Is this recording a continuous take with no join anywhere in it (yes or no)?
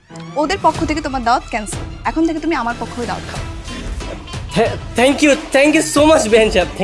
yes